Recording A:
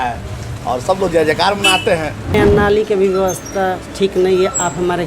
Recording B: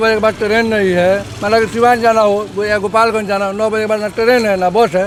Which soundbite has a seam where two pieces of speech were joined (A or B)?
A